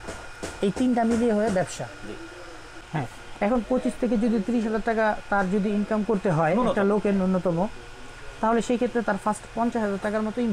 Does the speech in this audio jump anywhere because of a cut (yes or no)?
yes